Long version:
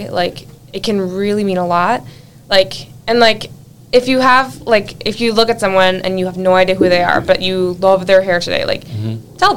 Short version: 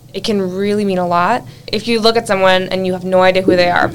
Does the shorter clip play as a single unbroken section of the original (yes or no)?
no